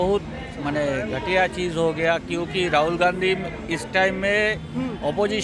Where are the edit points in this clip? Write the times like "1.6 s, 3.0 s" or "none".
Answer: none